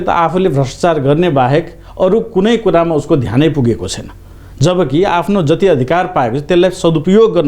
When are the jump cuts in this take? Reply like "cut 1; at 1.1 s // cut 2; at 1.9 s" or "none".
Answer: none

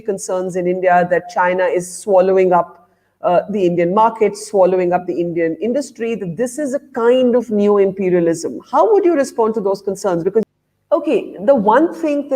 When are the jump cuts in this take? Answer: cut 1; at 10.4 s

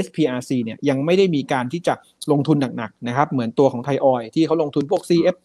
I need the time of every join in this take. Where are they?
none

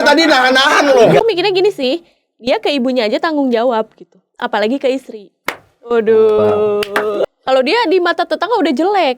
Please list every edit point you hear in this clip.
cut 1; at 1.2 s // cut 2; at 7.2 s

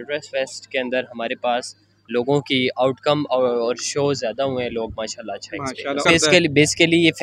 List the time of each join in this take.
none

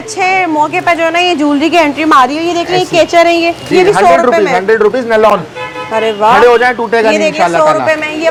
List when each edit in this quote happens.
none

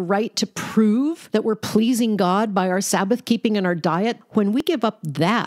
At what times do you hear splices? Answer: cut 1; at 1.2 s // cut 2; at 4.6 s

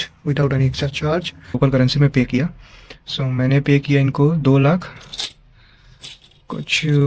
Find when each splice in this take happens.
cut 1; at 1.6 s

